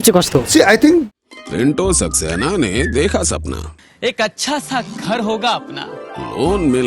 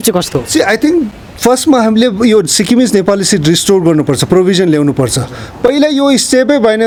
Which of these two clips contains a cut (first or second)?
first